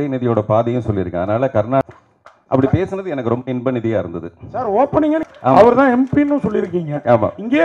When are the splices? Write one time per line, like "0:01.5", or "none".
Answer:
0:01.8
0:05.2